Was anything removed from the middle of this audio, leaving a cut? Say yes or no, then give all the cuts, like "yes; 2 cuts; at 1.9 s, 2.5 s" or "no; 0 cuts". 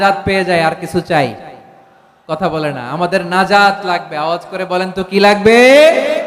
no; 0 cuts